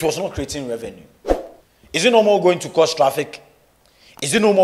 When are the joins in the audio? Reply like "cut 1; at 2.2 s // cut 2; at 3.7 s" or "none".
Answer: none